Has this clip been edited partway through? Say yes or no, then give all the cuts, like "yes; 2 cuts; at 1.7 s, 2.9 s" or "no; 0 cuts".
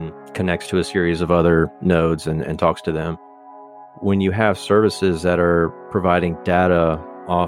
yes; 1 cut; at 3.8 s